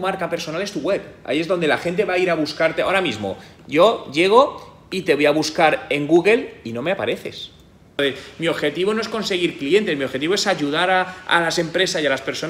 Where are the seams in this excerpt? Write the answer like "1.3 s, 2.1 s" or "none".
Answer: 7.8 s